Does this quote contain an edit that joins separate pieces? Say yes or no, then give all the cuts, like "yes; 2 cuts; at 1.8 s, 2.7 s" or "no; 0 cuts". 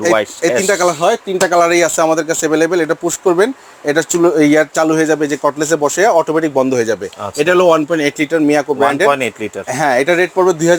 no; 0 cuts